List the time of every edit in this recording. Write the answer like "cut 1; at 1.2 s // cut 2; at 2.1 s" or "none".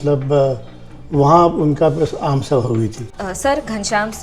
cut 1; at 3.1 s